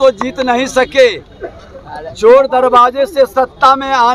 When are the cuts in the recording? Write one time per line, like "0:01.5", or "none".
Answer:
none